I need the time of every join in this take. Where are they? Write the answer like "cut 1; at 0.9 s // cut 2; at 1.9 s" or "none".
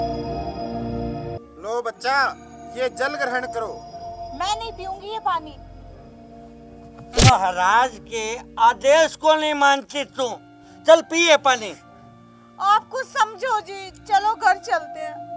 cut 1; at 1.4 s